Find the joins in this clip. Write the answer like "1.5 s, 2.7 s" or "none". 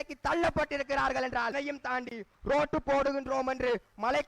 1.5 s